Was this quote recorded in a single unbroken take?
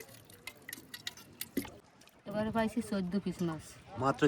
no; 1 cut; at 1.8 s

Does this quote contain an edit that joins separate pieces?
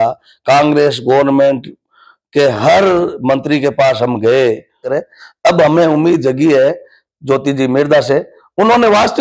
yes; 1 cut; at 4.9 s

